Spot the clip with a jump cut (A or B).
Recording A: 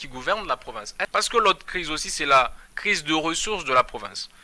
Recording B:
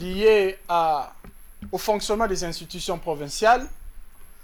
A